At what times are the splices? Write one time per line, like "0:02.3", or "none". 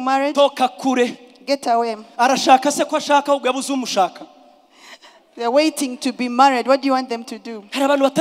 none